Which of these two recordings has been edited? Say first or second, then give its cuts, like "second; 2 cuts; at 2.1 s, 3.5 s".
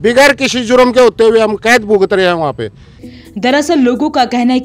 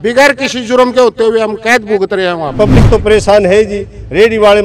second; 1 cut; at 2.5 s